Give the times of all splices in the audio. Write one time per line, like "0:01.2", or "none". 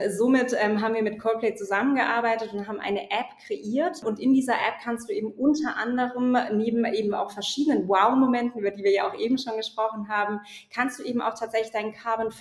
0:04.0